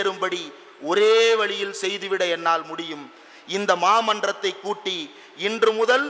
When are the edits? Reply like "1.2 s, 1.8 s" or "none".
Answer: none